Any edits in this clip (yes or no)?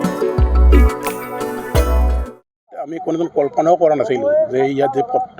yes